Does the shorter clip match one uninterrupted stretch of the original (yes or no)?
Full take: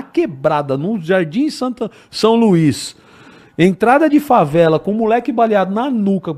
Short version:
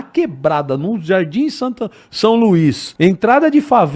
no